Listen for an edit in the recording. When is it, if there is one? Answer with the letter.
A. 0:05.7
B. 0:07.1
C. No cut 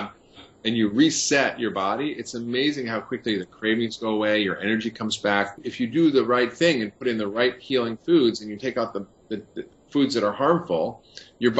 A